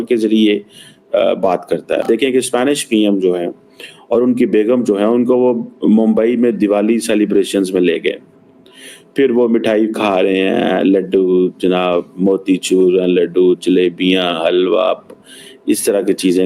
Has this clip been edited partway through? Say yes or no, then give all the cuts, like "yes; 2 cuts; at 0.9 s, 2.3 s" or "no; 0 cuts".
yes; 1 cut; at 2.0 s